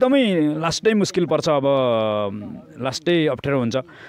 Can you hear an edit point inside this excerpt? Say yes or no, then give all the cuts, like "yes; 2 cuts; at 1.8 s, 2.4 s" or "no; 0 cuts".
no; 0 cuts